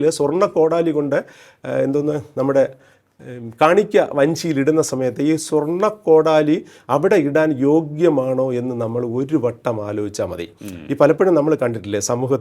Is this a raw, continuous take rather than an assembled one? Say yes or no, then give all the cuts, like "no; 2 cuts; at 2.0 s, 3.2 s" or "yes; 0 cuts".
yes; 0 cuts